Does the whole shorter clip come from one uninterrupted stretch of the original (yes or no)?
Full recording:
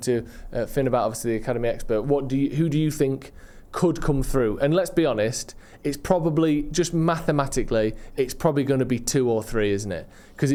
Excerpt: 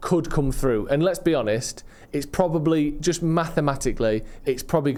yes